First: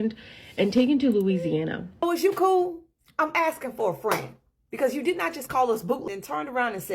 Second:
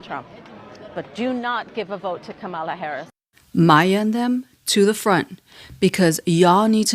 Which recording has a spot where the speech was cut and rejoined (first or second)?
first